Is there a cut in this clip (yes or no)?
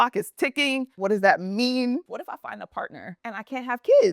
yes